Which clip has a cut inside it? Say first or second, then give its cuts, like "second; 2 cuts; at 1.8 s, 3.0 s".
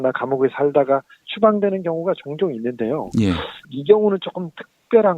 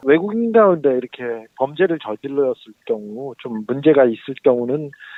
first; 1 cut; at 3.3 s